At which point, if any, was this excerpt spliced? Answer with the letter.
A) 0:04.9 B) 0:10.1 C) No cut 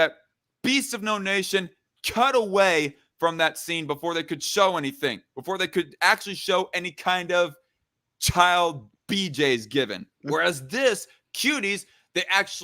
B